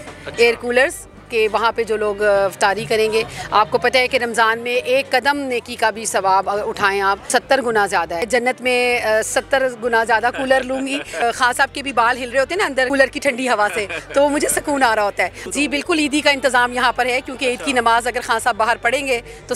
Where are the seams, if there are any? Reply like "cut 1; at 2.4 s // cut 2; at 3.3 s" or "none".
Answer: cut 1; at 7.3 s // cut 2; at 8.3 s // cut 3; at 11.2 s // cut 4; at 12.9 s // cut 5; at 15.4 s